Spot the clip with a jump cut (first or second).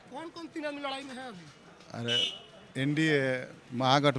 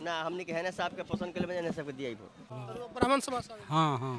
second